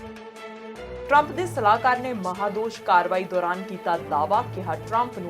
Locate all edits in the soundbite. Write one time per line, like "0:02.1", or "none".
0:01.1